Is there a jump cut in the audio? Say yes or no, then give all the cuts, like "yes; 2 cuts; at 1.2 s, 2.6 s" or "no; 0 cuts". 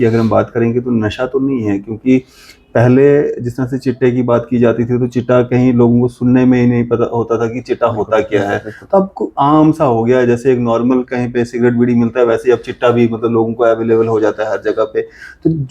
no; 0 cuts